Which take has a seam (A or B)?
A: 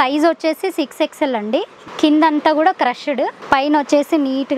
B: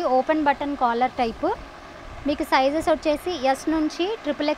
A